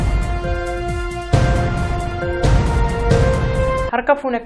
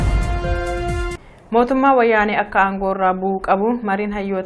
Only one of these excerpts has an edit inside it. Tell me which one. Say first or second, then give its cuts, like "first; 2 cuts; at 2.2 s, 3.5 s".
second; 1 cut; at 1.1 s